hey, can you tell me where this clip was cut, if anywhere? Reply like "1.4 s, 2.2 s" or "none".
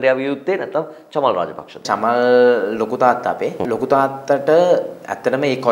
1.9 s, 3.6 s